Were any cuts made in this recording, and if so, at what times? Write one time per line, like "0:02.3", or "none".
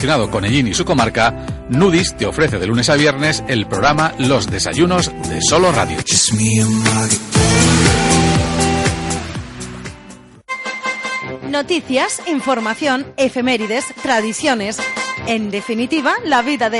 0:10.7